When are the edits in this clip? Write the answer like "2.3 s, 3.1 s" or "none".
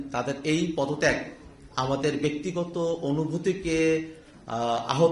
none